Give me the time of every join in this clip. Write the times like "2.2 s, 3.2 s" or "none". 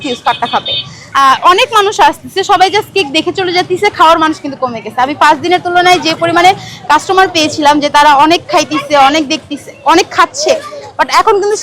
1.0 s